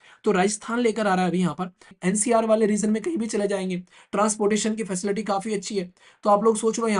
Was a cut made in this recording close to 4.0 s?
no; 1 cut; at 1.9 s

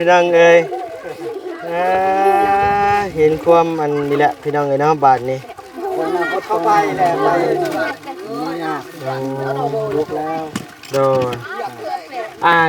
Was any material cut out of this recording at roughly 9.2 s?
no; 1 cut; at 7.8 s

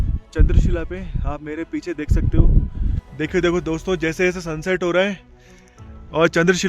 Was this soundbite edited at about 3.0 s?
yes; 1 cut; at 3.0 s

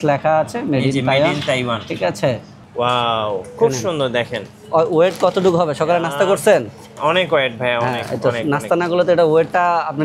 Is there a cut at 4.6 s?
no; 1 cut; at 2.6 s

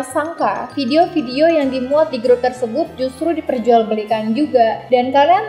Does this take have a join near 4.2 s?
no; 0 cuts

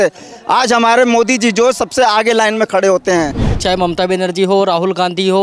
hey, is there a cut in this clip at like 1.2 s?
no; 1 cut; at 3.6 s

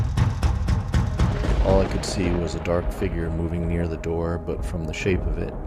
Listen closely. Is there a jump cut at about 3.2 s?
no; 1 cut; at 1.3 s

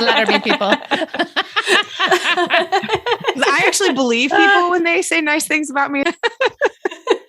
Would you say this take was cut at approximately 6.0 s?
yes; 1 cut; at 6.0 s

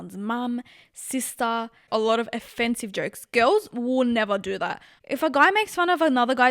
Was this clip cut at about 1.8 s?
no; 1 cut; at 4.9 s

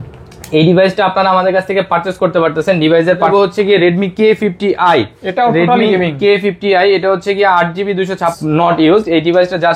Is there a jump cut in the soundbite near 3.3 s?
yes; 2 cuts; at 3.3 s, 8.3 s

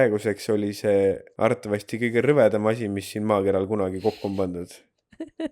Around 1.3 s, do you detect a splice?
yes; 1 cut; at 1.3 s

